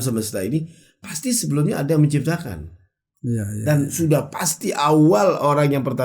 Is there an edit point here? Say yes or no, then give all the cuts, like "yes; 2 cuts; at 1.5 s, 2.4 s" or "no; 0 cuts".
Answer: no; 0 cuts